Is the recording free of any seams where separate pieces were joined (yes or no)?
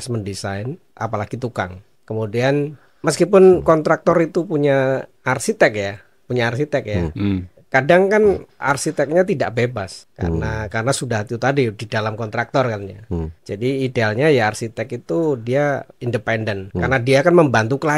no